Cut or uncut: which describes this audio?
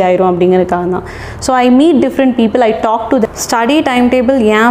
cut